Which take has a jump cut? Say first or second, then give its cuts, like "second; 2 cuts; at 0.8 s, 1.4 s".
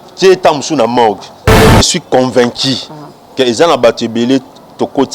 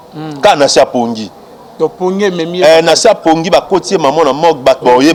first; 1 cut; at 1.8 s